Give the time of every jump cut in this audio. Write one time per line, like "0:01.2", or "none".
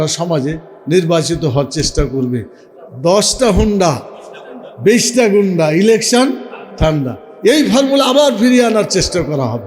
0:02.6